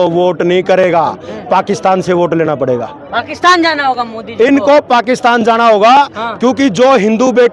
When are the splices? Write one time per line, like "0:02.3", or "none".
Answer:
none